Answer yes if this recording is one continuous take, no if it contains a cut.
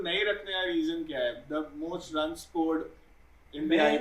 yes